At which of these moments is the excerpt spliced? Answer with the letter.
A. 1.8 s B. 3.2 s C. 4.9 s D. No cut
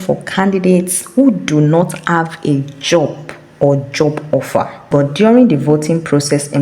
C